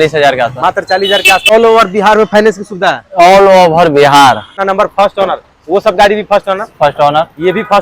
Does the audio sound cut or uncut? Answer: cut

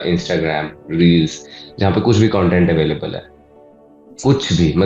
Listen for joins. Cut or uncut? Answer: uncut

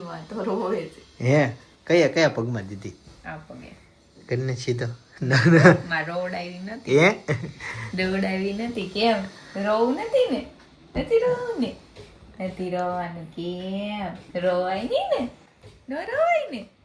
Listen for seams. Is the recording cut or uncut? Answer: uncut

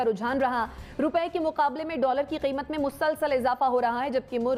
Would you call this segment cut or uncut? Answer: uncut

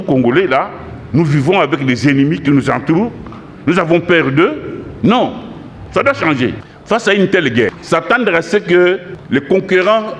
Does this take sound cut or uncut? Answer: cut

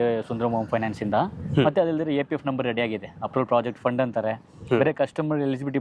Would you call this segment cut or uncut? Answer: uncut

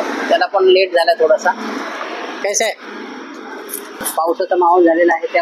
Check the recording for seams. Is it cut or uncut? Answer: cut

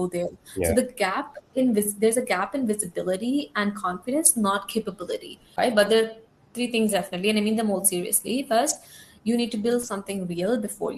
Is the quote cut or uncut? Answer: cut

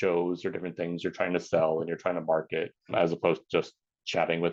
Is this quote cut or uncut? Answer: cut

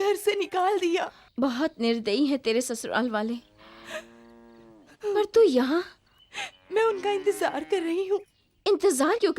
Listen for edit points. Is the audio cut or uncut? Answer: cut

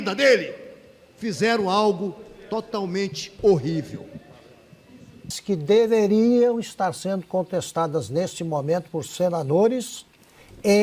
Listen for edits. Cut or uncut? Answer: cut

